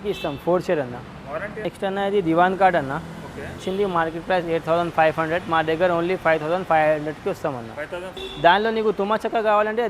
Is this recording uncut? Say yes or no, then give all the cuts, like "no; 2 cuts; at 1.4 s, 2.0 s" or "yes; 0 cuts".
no; 3 cuts; at 1.6 s, 3.6 s, 8.2 s